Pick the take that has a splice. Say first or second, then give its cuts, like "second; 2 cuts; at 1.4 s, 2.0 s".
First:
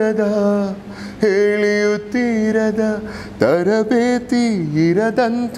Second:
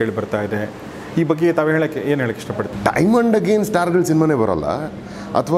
second; 1 cut; at 2.7 s